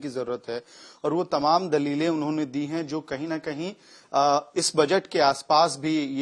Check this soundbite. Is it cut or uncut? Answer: uncut